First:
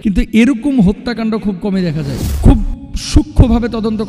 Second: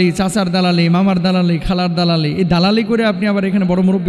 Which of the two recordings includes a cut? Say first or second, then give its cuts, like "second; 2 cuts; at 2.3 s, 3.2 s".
first; 1 cut; at 2.3 s